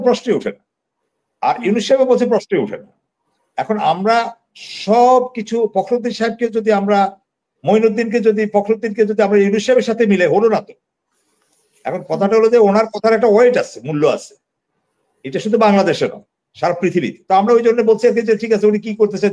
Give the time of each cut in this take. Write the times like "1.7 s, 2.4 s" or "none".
none